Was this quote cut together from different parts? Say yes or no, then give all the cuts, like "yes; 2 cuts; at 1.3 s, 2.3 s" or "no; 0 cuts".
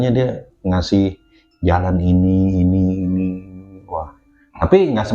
no; 0 cuts